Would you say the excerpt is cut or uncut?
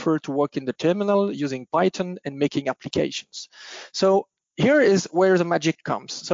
uncut